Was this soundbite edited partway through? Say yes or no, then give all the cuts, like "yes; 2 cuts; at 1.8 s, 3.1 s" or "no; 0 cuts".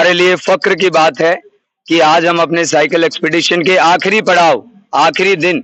no; 0 cuts